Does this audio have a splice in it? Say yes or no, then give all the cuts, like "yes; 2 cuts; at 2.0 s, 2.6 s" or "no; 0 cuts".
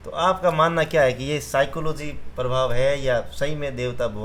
no; 0 cuts